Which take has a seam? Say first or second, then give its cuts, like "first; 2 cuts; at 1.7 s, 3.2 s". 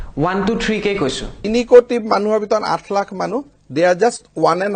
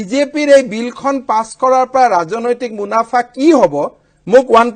first; 1 cut; at 1.4 s